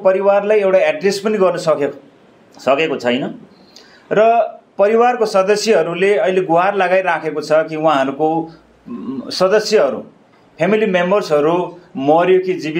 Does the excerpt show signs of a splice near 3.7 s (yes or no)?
no